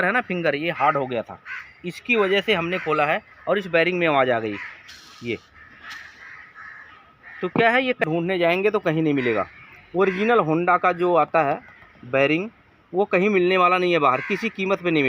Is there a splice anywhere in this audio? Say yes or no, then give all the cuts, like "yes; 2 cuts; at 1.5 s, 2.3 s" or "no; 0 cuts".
yes; 1 cut; at 8.0 s